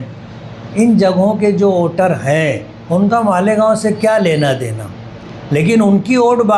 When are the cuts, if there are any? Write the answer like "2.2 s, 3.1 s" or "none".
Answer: none